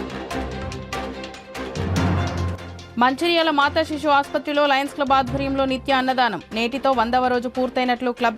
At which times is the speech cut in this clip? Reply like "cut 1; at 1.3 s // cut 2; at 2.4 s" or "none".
cut 1; at 1.0 s